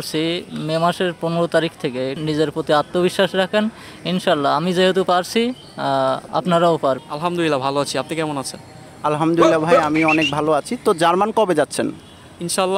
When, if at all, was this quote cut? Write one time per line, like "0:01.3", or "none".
0:02.2
0:07.1